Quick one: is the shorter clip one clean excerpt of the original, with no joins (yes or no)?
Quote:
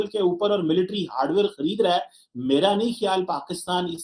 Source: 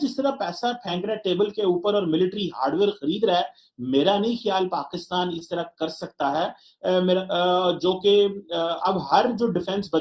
yes